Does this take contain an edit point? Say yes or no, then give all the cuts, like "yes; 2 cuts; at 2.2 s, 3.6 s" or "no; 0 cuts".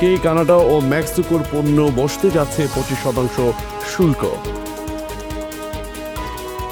no; 0 cuts